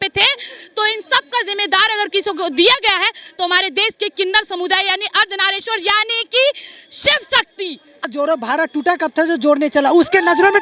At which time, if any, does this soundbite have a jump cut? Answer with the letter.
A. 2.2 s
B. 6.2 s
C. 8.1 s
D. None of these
C